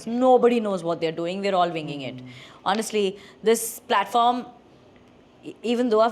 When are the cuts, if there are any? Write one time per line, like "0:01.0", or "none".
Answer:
none